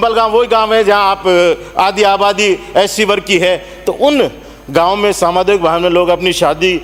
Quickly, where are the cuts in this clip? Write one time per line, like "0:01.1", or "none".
none